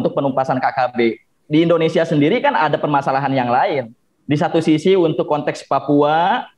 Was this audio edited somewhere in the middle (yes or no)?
yes